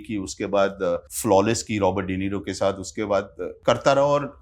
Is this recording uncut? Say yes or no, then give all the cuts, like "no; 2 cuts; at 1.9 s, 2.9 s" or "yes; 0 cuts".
no; 2 cuts; at 1.1 s, 3.4 s